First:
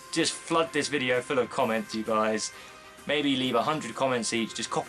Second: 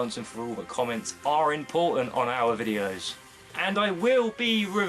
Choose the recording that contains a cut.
second; 1 cut; at 3.5 s

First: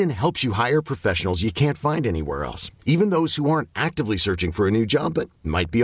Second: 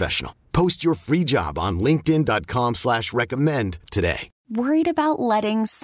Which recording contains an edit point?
second; 1 cut; at 4.3 s

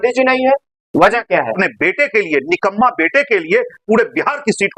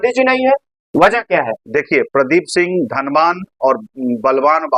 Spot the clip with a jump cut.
first; 1 cut; at 1.6 s

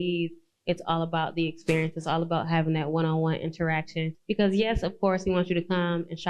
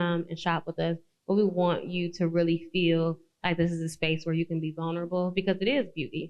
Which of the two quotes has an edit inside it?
first; 1 cut; at 4.1 s

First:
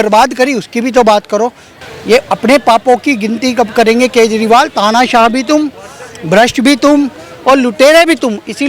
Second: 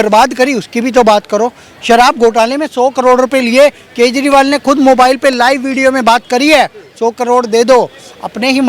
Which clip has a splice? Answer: first; 1 cut; at 1.7 s

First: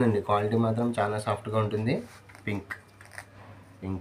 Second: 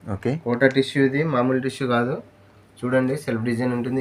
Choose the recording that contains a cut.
first; 1 cut; at 2.2 s

